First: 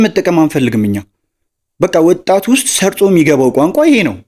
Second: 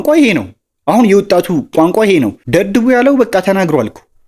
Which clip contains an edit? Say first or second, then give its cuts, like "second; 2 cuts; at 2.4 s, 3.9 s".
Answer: second; 1 cut; at 2.4 s